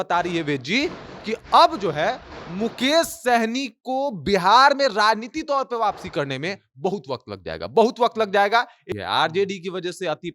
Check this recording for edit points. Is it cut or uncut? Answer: cut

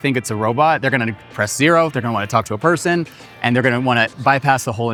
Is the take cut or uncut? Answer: uncut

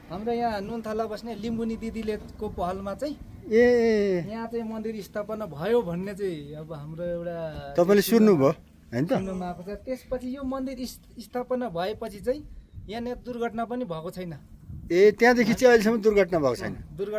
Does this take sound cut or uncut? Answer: uncut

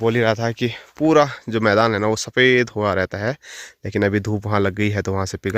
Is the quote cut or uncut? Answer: uncut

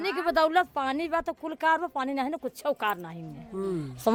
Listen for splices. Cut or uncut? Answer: uncut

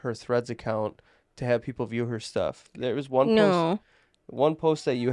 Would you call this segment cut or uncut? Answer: uncut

